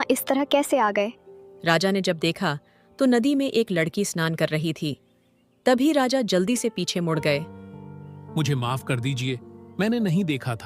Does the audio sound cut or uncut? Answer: uncut